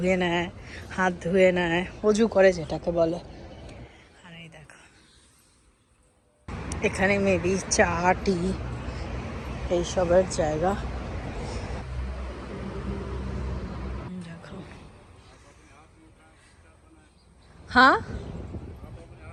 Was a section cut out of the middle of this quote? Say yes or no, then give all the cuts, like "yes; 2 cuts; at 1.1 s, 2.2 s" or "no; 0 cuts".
no; 0 cuts